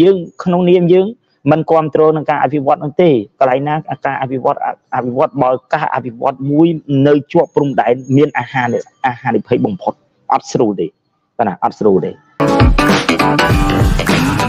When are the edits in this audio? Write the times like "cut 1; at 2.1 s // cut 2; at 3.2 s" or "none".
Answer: cut 1; at 12.4 s